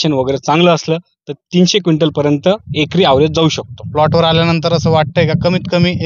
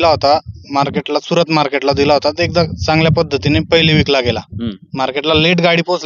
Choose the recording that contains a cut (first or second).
first